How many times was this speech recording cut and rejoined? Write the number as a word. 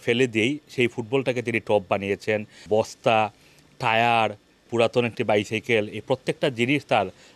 two